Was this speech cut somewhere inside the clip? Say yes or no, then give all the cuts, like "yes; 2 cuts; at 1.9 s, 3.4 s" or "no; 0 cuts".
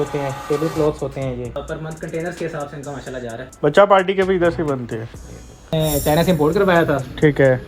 yes; 3 cuts; at 1.6 s, 3.4 s, 5.7 s